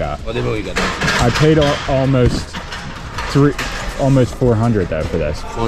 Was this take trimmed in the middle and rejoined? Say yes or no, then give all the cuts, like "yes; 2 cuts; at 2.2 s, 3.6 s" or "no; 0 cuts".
no; 0 cuts